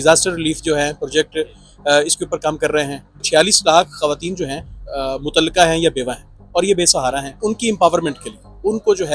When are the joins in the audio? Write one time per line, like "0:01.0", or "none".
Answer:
0:03.2
0:04.8
0:07.3